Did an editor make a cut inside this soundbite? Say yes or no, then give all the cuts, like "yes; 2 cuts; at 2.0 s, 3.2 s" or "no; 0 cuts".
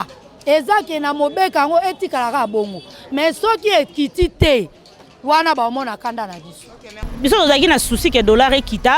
yes; 1 cut; at 6.6 s